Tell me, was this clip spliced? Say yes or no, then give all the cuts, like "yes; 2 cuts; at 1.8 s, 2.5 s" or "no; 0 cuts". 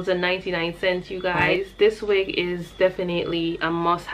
yes; 1 cut; at 1.4 s